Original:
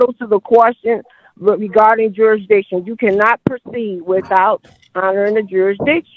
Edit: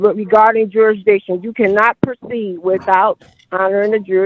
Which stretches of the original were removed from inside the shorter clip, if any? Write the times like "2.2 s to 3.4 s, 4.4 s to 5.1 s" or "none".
none